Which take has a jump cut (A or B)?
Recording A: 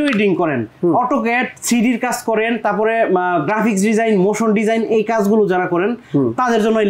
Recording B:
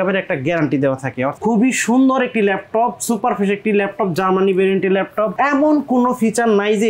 B